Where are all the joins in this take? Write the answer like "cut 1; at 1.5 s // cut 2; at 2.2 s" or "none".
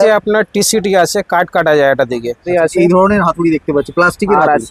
cut 1; at 2.4 s